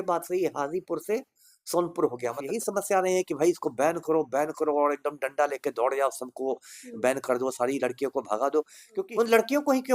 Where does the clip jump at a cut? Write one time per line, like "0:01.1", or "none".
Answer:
0:02.4
0:09.0